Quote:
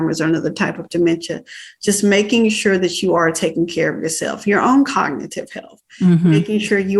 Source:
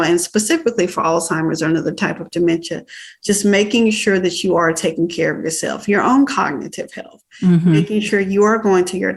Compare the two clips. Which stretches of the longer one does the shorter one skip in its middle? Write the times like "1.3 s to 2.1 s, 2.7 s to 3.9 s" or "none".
none